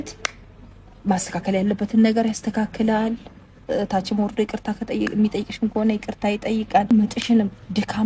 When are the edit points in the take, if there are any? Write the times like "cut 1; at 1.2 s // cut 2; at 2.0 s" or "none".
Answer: cut 1; at 6.9 s